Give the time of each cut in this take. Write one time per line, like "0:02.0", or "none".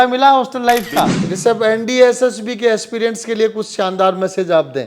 0:01.2